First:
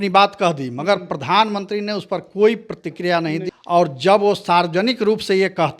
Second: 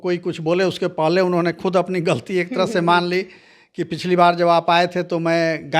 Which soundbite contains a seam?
first; 1 cut; at 3.5 s

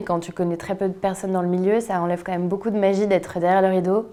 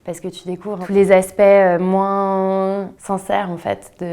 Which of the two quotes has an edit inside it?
second; 2 cuts; at 0.8 s, 2.9 s

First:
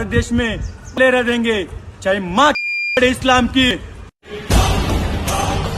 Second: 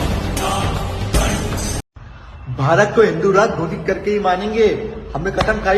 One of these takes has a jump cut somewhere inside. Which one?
second; 1 cut; at 1.8 s

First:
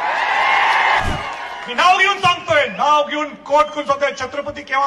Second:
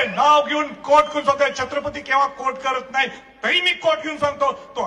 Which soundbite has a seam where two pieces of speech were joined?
first; 1 cut; at 1.0 s

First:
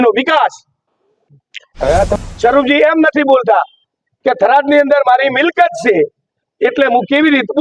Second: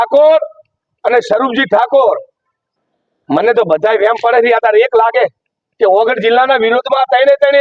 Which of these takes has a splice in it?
first; 1 cut; at 2.1 s

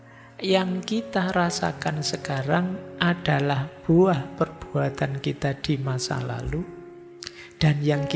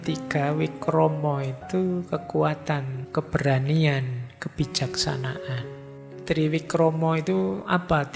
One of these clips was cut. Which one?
second; 2 cuts; at 3.0 s, 5.7 s

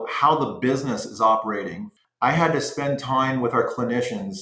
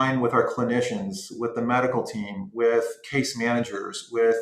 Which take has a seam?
first; 1 cut; at 1.8 s

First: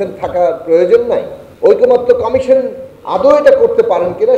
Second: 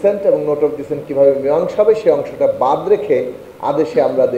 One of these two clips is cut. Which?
first; 1 cut; at 1.4 s

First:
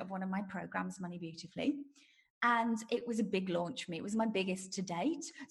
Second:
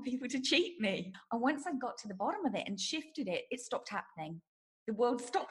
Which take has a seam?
second; 1 cut; at 1.1 s

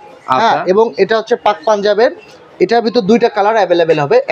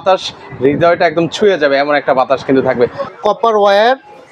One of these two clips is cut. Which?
second; 1 cut; at 3.1 s

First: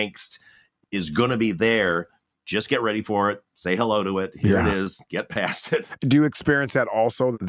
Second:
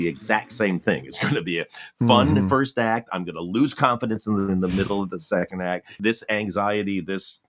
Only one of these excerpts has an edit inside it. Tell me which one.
second; 1 cut; at 5.9 s

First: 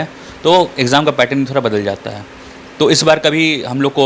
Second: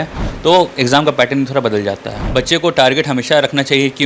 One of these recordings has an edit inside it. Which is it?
second; 1 cut; at 2.1 s

